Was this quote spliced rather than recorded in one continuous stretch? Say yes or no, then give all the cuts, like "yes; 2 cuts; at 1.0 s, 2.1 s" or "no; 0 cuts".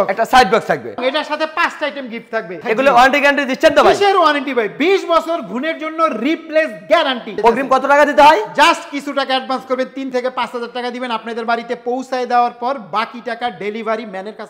yes; 3 cuts; at 1.0 s, 2.5 s, 7.4 s